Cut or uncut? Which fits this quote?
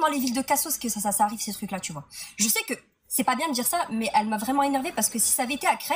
cut